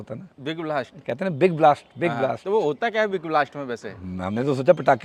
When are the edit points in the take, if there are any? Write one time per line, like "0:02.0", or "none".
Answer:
none